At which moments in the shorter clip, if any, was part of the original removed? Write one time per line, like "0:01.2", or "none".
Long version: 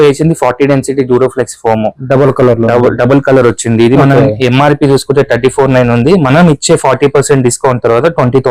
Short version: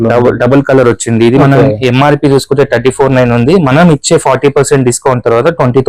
none